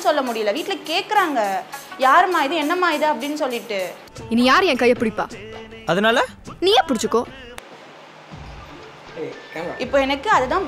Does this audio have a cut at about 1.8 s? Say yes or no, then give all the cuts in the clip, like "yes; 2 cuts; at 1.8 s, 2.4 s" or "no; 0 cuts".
no; 0 cuts